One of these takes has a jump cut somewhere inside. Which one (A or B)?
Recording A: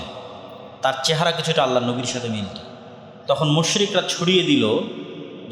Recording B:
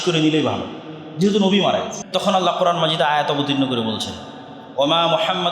B